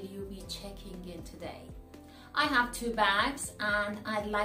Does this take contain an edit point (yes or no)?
yes